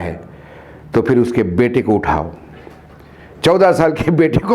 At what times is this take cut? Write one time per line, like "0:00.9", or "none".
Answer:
none